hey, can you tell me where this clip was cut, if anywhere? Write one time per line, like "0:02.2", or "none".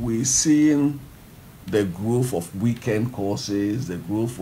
none